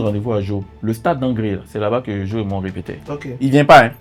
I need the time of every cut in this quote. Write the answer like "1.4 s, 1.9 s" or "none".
none